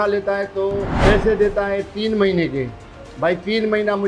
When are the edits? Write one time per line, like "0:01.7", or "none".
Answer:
0:00.9